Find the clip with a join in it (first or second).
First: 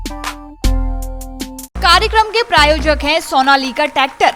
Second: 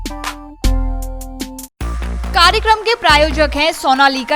first